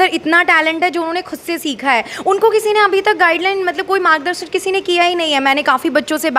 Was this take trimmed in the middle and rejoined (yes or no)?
no